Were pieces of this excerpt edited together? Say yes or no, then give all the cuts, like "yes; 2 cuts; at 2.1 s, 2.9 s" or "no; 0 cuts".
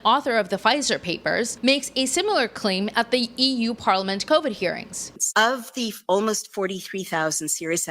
yes; 2 cuts; at 1.5 s, 5.1 s